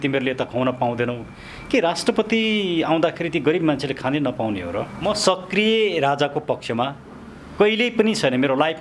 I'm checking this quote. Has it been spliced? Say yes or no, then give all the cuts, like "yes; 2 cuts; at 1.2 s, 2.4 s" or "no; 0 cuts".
yes; 1 cut; at 5.0 s